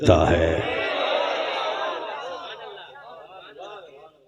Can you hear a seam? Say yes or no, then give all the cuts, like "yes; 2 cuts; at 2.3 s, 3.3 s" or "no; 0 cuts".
no; 0 cuts